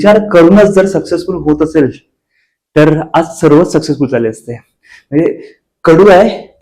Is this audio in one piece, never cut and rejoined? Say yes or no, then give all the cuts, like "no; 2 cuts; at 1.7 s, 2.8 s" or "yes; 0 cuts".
yes; 0 cuts